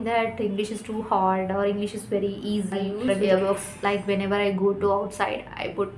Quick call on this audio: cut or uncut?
cut